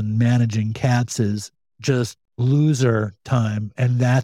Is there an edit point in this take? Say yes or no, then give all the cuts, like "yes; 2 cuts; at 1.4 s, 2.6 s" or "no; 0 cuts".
yes; 1 cut; at 2.2 s